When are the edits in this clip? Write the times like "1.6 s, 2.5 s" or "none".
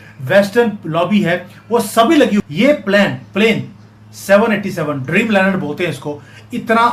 2.4 s